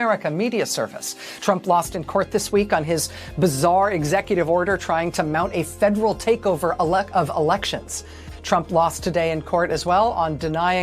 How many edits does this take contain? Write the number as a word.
one